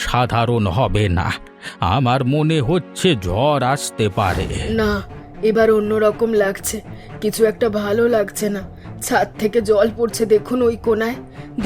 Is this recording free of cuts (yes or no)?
no